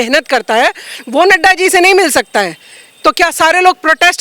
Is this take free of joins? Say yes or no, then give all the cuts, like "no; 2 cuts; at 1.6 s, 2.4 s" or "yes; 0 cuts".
yes; 0 cuts